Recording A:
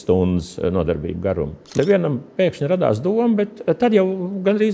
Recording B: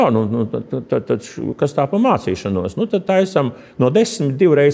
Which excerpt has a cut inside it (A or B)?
A